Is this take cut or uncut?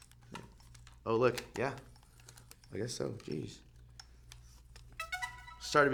uncut